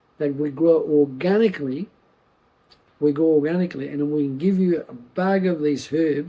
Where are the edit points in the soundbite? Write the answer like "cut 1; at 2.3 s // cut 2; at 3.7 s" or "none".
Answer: cut 1; at 2.7 s